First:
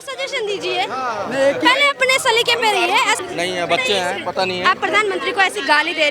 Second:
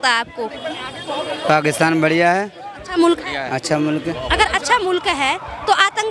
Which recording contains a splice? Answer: first; 1 cut; at 3.2 s

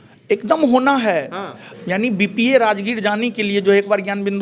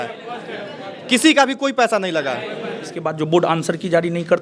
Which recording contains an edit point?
second; 1 cut; at 3.1 s

